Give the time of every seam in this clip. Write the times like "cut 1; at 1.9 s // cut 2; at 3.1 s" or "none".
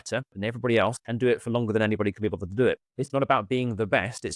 cut 1; at 1.0 s // cut 2; at 3.0 s